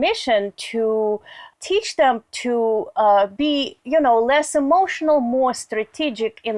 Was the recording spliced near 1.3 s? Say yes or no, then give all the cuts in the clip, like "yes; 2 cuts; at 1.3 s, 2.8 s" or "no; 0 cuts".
yes; 1 cut; at 1.3 s